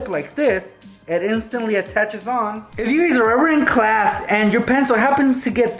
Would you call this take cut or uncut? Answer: cut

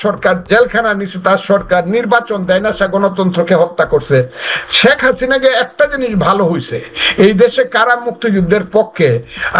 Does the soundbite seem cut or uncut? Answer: uncut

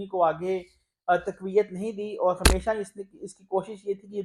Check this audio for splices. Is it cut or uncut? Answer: uncut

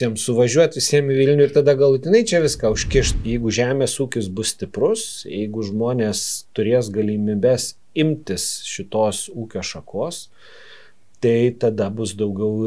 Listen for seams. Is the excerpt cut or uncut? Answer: cut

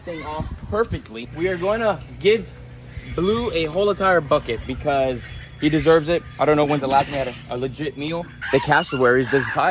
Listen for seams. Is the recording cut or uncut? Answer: cut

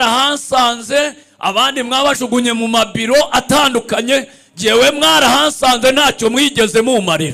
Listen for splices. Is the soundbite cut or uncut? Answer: uncut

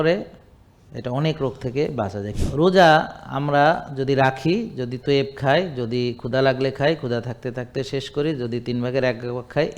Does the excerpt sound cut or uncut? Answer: cut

